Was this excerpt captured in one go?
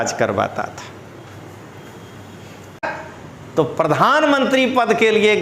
no; 1 cut; at 2.9 s

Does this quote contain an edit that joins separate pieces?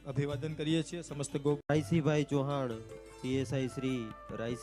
no; 0 cuts

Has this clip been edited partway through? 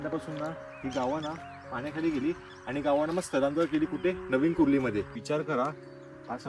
yes; 1 cut; at 5.1 s

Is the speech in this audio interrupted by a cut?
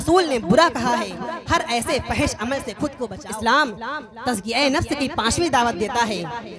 yes; 1 cut; at 3.1 s

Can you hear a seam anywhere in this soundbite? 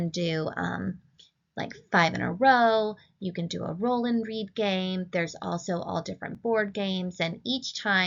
yes; 1 cut; at 7.1 s

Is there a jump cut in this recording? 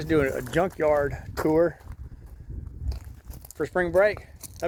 no; 0 cuts

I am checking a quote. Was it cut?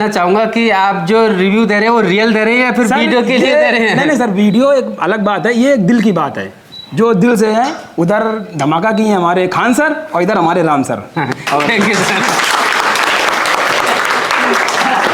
no; 0 cuts

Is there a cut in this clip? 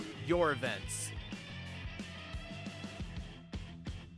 no; 0 cuts

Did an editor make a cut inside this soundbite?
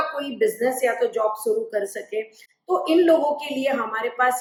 no; 0 cuts

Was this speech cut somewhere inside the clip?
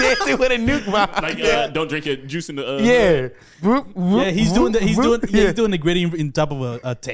no; 0 cuts

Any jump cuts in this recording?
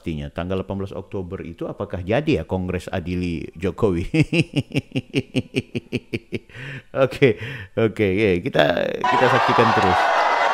no; 0 cuts

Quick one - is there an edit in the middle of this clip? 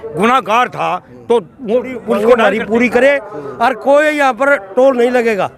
yes; 1 cut; at 2.2 s

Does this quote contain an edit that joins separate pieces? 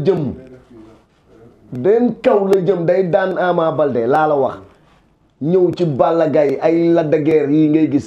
no; 0 cuts

